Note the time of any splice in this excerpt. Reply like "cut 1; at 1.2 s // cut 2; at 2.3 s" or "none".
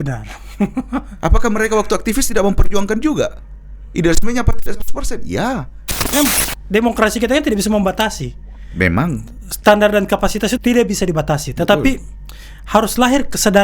cut 1; at 6.1 s